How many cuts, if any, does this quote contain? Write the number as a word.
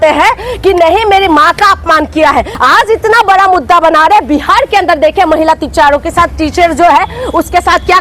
one